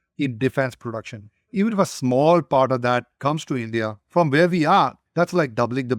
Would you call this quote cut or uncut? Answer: cut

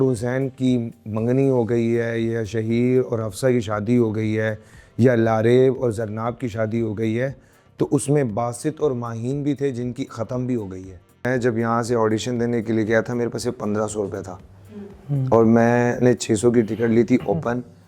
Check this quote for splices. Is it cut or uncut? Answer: cut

